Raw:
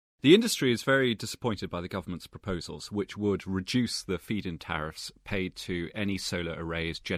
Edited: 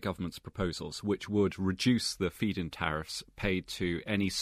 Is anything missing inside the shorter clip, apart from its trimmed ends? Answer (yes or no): no